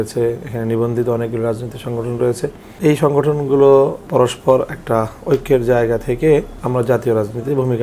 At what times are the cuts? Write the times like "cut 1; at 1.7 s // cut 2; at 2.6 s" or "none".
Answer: cut 1; at 2.7 s // cut 2; at 4.0 s // cut 3; at 6.6 s